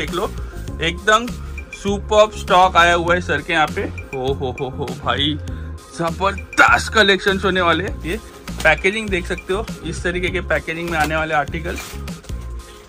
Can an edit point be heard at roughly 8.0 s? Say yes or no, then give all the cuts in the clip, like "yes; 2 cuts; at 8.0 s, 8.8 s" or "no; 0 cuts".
yes; 1 cut; at 8.0 s